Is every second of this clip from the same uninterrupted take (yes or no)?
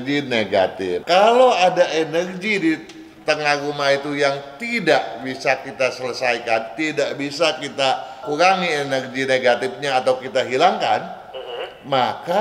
no